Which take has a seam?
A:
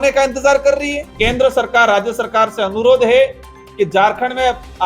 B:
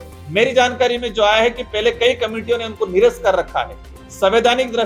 A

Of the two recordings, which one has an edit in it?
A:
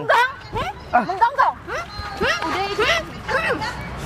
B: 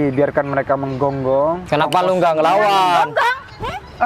B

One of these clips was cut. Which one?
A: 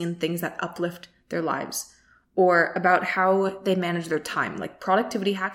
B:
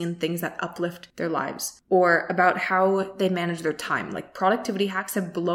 B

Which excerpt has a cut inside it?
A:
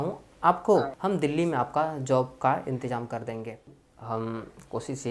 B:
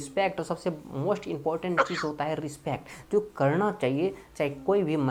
A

